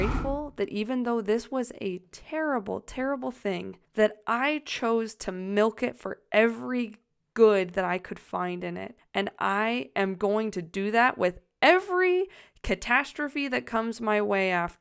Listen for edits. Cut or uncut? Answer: cut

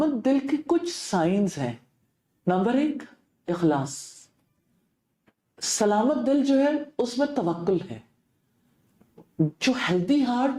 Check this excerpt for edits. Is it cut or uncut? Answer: uncut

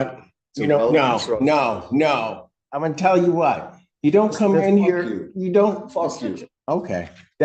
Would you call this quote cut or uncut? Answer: uncut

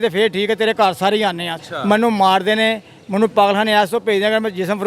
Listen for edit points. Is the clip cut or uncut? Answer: cut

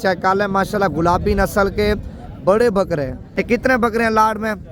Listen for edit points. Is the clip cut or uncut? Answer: cut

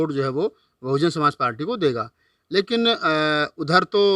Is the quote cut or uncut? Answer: uncut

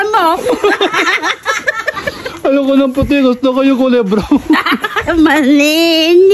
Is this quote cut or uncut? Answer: uncut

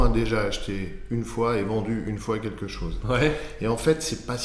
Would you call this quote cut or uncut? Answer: uncut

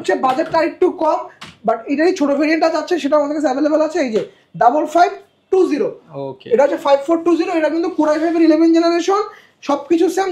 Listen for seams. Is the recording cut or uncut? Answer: uncut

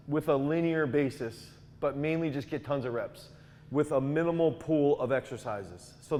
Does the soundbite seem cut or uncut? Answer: uncut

